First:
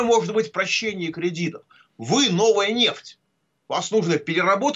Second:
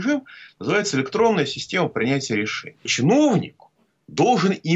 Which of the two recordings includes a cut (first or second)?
second